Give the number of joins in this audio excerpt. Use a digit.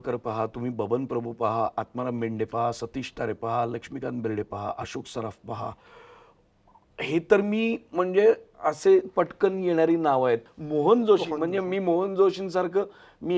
1